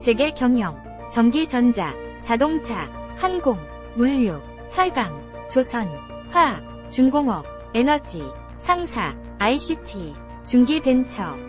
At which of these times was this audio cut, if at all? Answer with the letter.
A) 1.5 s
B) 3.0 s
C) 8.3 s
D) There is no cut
B